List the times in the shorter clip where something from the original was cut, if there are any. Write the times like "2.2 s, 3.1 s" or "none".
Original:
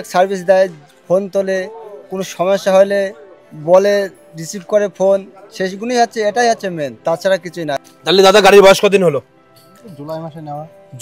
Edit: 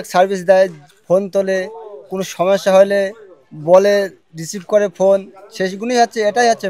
none